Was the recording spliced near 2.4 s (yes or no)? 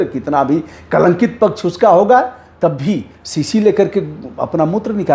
no